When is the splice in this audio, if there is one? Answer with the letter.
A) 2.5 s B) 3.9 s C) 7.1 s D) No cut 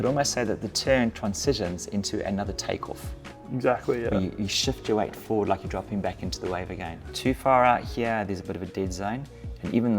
C